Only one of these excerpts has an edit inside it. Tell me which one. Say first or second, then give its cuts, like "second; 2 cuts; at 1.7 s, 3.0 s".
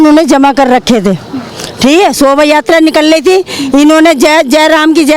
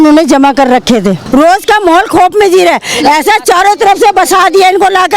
second; 1 cut; at 1.2 s